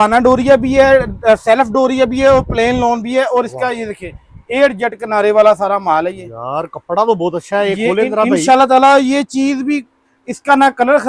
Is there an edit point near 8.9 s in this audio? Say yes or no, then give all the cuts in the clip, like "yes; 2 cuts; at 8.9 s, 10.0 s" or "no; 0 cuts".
no; 0 cuts